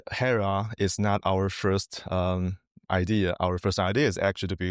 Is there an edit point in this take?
no; 0 cuts

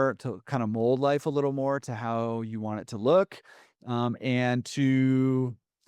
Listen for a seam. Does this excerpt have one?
no; 0 cuts

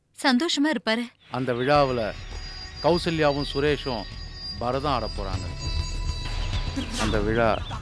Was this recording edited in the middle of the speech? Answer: yes; 1 cut; at 1.2 s

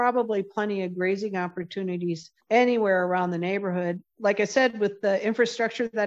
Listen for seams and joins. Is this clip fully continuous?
no; 2 cuts; at 2.3 s, 4.1 s

